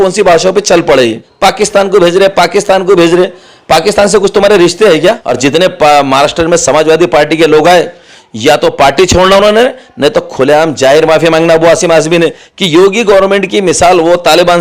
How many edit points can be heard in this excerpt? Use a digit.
3